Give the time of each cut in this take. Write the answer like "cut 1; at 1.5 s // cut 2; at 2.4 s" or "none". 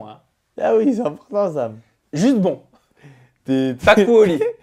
none